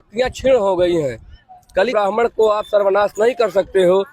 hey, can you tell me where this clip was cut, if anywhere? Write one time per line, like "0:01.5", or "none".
0:01.9